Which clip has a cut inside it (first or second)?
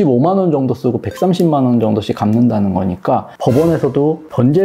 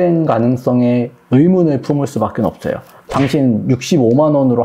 first